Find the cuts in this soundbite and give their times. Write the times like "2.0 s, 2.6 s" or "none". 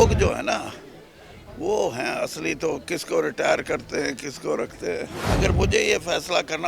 5.2 s